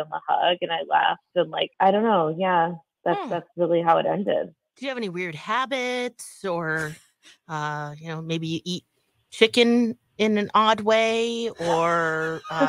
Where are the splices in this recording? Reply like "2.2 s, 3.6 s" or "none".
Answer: 1.6 s, 4.7 s